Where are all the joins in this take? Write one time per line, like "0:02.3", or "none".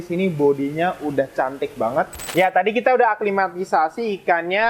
0:02.2